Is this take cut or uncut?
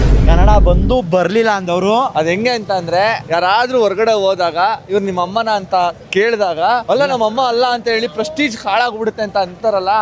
cut